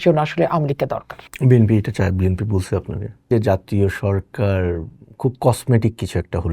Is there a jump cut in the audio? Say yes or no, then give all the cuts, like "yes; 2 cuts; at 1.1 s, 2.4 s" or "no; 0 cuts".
yes; 1 cut; at 3.3 s